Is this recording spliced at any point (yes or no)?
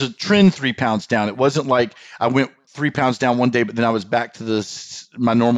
no